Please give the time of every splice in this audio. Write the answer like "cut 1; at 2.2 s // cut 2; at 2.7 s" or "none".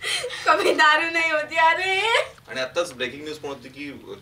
cut 1; at 2.4 s

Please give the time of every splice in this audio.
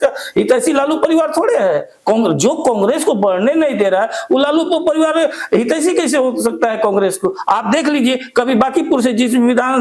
none

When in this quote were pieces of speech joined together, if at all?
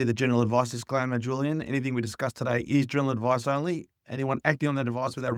none

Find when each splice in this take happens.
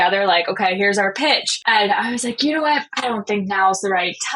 cut 1; at 1.5 s // cut 2; at 2.9 s

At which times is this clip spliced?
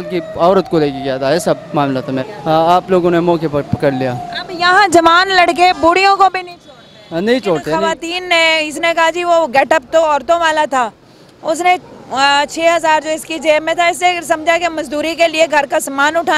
cut 1; at 2.3 s // cut 2; at 7.8 s

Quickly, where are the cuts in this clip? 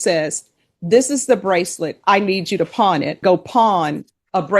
cut 1; at 3.2 s

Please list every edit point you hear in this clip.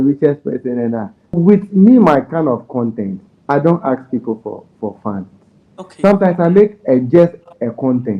cut 1; at 1.3 s

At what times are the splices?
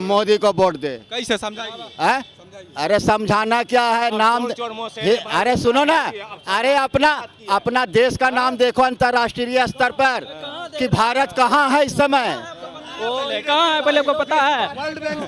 none

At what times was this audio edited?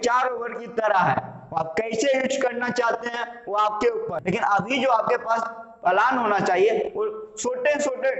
cut 1; at 4.2 s

